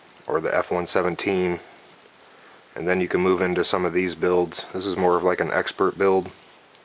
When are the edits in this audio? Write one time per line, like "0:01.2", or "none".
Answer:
0:03.4